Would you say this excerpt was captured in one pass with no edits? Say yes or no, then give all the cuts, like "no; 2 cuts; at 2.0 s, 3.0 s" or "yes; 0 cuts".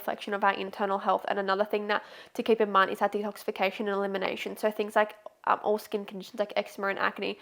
yes; 0 cuts